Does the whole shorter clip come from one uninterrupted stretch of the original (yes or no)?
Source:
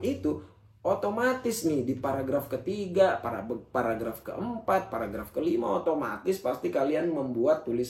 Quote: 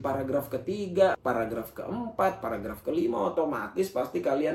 no